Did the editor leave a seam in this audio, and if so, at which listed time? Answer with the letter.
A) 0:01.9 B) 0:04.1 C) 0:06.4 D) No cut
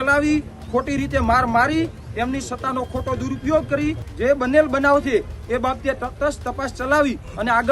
B